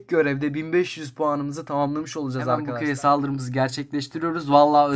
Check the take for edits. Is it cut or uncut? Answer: cut